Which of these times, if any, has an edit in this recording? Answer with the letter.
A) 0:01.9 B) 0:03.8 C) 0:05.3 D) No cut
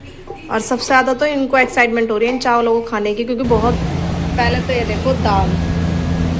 B